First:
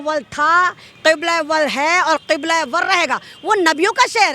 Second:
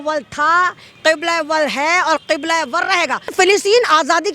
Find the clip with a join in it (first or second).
second